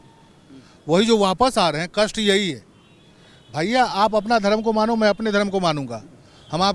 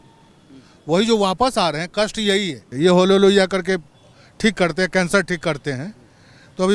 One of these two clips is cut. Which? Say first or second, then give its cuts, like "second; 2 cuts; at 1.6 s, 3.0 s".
second; 1 cut; at 2.6 s